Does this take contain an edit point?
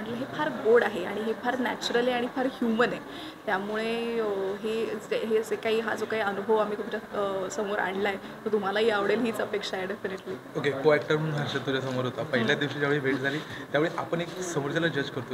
no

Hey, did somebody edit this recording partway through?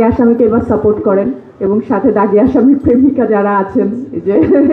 no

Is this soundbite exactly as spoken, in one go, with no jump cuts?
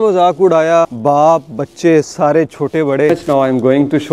no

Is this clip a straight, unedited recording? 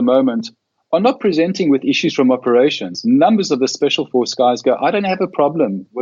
yes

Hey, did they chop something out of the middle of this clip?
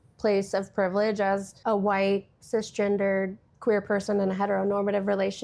yes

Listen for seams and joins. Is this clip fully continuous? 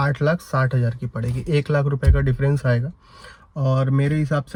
yes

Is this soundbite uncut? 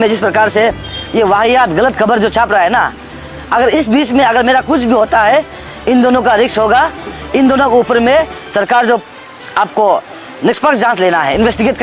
yes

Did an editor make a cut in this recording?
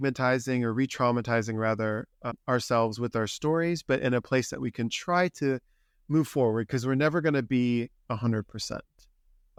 no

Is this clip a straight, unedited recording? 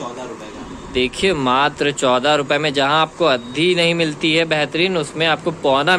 yes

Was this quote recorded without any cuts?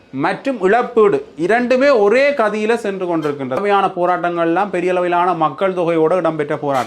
no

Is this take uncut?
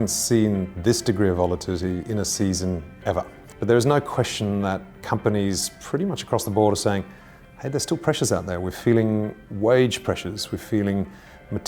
no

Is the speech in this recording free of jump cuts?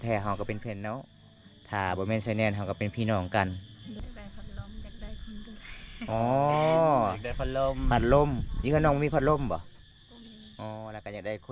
no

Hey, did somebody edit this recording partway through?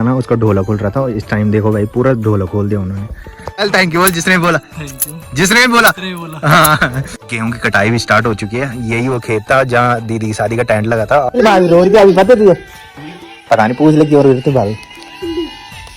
yes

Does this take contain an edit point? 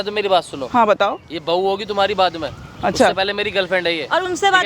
no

